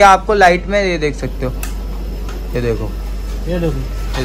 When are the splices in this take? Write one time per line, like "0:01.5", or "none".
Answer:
none